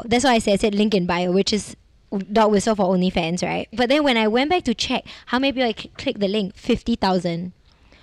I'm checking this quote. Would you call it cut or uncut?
cut